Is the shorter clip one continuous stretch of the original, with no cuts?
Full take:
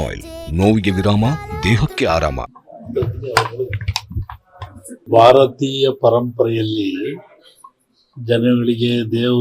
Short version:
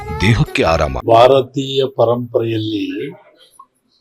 no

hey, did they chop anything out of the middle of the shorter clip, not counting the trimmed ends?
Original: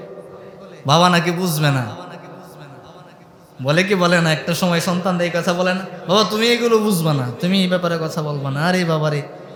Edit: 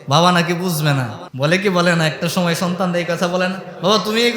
yes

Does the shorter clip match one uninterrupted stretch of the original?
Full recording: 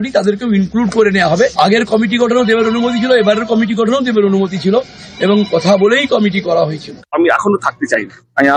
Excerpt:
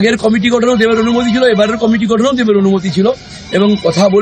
yes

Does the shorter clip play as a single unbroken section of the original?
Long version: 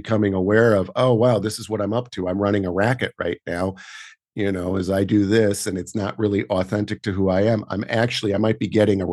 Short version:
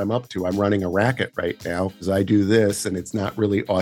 no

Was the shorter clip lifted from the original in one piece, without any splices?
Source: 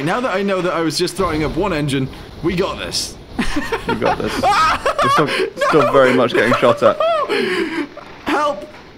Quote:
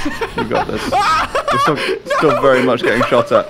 yes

